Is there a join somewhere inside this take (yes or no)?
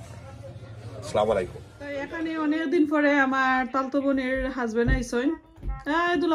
yes